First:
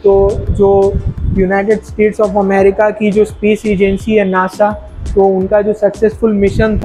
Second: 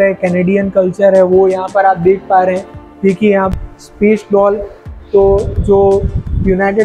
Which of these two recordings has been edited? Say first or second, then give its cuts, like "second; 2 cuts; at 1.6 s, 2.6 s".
second; 1 cut; at 3.5 s